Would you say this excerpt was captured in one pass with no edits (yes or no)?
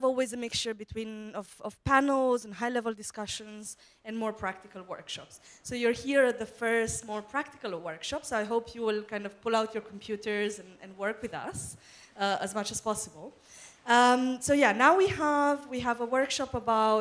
yes